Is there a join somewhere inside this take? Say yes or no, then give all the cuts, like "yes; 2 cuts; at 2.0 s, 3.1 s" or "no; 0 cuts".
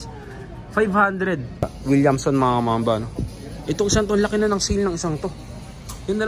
yes; 1 cut; at 1.8 s